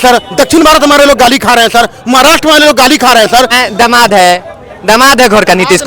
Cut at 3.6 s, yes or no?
yes